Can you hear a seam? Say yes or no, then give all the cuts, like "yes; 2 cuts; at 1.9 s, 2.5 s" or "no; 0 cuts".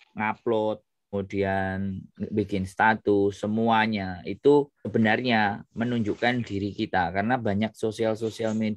yes; 2 cuts; at 1.1 s, 4.9 s